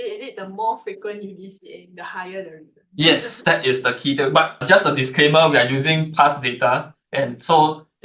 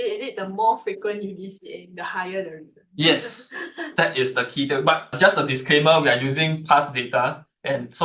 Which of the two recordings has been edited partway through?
first; 1 cut; at 3.3 s

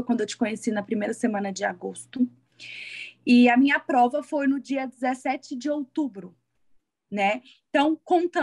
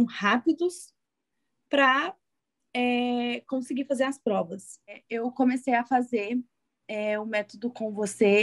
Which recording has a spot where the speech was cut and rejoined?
second; 1 cut; at 5.0 s

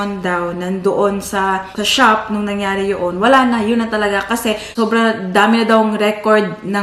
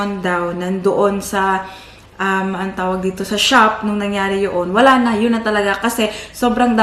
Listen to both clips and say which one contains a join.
first; 2 cuts; at 1.7 s, 4.7 s

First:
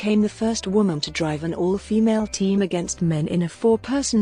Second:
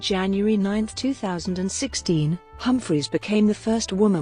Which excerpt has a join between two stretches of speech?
second; 1 cut; at 2.1 s

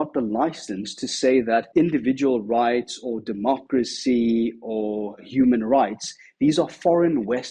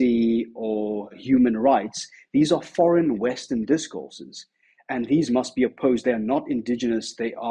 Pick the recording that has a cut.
first; 1 cut; at 1.7 s

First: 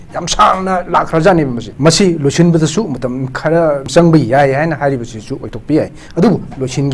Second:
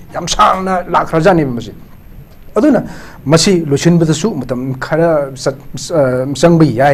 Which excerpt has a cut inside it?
first; 2 cuts; at 1.6 s, 3.9 s

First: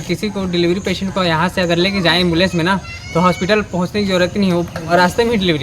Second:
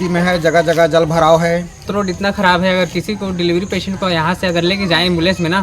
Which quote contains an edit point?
second; 1 cut; at 1.8 s

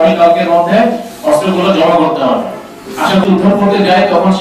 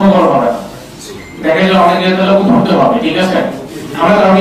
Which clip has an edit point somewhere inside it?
first; 1 cut; at 3.2 s

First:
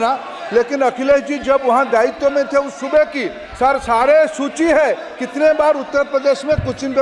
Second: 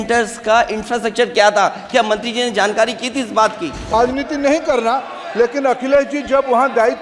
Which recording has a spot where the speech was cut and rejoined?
second; 1 cut; at 3.9 s

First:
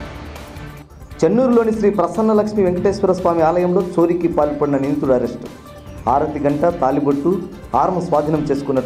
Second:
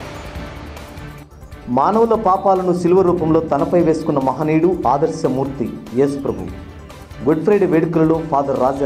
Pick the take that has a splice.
second; 1 cut; at 1.2 s

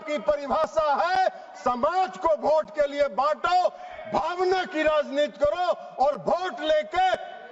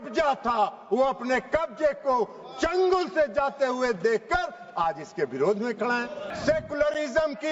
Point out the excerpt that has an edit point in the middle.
second; 1 cut; at 6.2 s

